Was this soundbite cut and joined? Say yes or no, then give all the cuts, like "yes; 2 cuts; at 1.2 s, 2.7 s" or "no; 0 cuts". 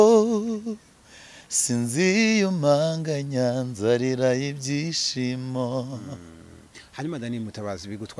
no; 0 cuts